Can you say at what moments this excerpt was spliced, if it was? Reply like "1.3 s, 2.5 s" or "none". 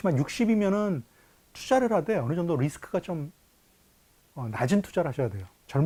none